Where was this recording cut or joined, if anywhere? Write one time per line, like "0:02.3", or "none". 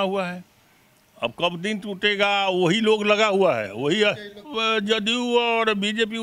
0:04.4